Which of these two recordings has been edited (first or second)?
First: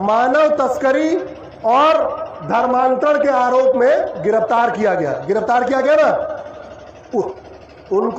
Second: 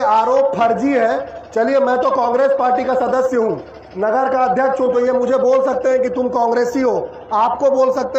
first